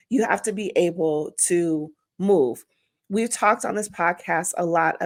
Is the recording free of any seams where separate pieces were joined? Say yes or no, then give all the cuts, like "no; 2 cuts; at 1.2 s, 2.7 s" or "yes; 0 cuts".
yes; 0 cuts